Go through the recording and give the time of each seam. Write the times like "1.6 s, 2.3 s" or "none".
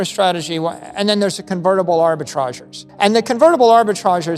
2.9 s